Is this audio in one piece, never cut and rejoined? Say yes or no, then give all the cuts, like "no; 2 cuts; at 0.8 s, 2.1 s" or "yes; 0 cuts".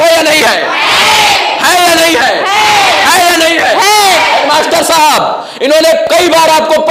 yes; 0 cuts